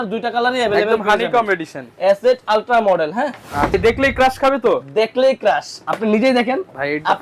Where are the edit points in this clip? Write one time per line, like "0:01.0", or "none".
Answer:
0:03.7